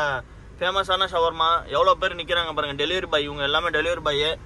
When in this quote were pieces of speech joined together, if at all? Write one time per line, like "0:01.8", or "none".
none